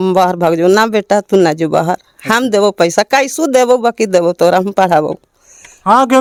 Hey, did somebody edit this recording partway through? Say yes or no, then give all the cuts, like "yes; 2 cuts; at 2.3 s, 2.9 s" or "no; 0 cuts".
no; 0 cuts